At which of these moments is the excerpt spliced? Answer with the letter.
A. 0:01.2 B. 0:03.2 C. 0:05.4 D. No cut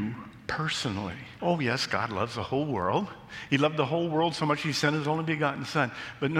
A